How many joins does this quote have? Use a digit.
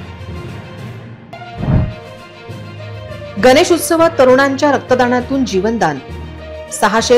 1